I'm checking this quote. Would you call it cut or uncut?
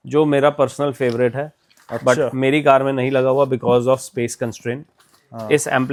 uncut